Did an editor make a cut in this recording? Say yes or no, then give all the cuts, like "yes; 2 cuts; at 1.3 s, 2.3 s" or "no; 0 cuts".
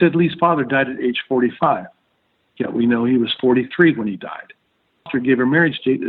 yes; 1 cut; at 5.1 s